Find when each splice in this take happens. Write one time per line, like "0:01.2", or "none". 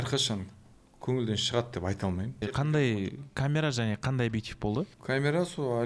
0:02.3
0:05.0